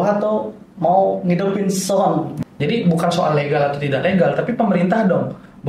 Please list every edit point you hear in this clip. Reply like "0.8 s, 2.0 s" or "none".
2.3 s